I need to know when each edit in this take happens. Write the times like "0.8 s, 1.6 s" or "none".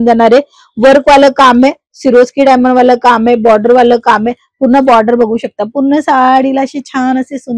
none